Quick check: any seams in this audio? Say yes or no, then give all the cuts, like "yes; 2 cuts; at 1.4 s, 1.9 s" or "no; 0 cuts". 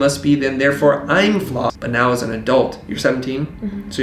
yes; 1 cut; at 1.7 s